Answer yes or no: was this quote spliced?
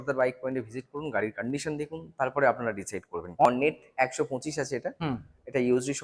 yes